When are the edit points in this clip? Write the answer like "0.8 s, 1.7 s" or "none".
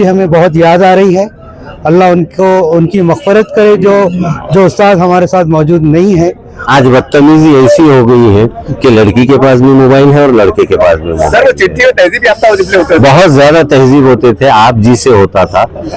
6.6 s